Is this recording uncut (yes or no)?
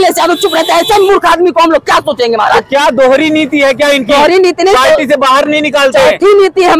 yes